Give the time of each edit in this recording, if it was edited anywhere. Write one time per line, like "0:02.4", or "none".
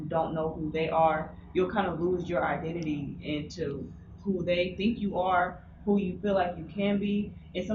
none